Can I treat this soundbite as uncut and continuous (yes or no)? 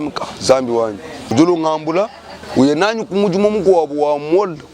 no